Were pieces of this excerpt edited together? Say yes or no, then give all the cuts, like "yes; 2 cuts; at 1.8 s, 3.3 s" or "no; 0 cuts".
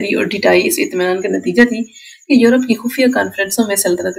no; 0 cuts